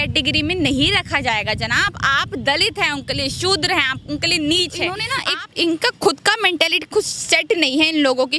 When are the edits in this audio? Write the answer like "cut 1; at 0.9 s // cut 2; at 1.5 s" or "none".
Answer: cut 1; at 5.1 s

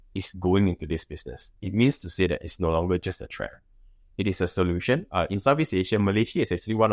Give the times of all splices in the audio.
cut 1; at 5.1 s

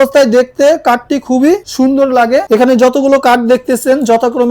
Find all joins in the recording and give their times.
cut 1; at 2.5 s

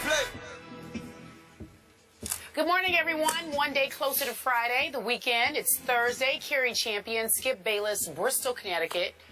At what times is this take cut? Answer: none

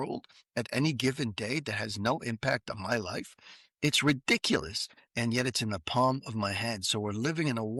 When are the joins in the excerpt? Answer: none

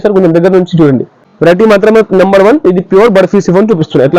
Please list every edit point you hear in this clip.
cut 1; at 1.2 s

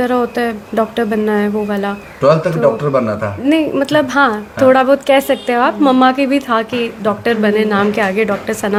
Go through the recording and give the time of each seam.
none

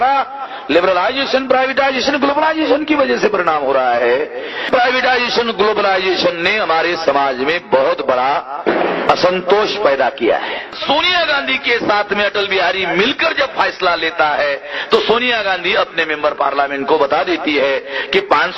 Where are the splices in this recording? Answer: cut 1; at 4.7 s // cut 2; at 10.8 s

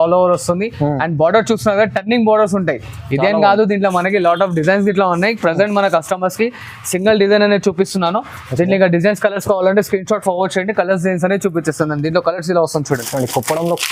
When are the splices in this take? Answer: none

